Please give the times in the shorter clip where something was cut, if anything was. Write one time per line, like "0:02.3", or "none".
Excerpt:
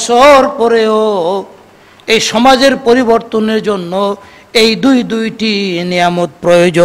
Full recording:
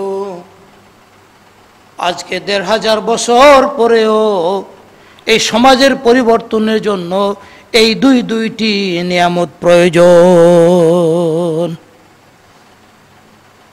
none